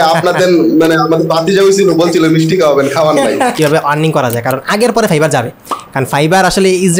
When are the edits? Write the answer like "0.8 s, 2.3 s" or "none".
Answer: 3.5 s